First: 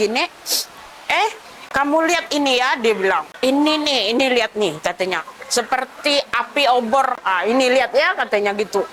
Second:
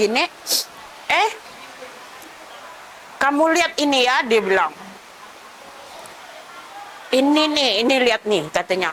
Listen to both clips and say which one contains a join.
first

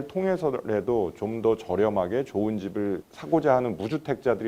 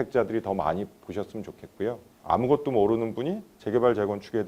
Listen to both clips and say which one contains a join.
second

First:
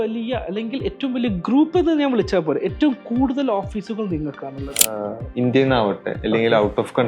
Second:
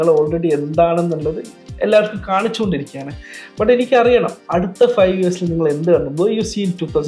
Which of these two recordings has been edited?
first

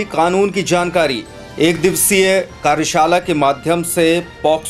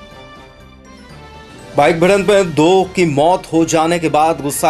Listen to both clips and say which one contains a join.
second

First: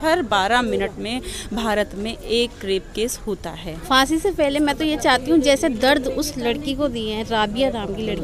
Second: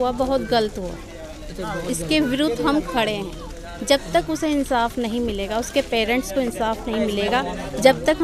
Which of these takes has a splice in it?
first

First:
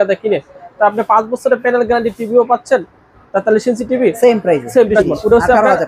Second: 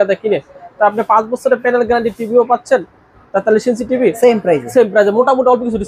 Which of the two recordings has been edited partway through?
first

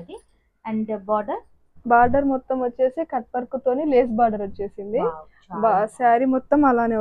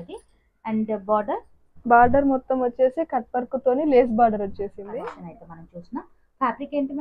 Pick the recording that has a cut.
second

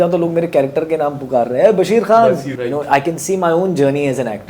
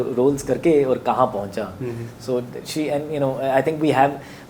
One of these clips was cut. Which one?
first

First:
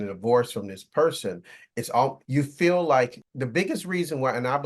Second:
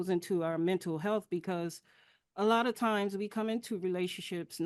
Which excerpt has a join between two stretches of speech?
first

